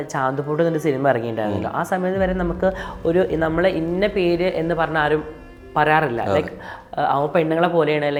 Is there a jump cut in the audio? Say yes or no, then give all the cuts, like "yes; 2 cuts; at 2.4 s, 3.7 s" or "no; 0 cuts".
no; 0 cuts